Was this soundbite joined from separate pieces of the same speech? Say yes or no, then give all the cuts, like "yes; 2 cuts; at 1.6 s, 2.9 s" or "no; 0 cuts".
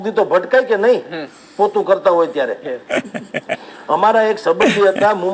no; 0 cuts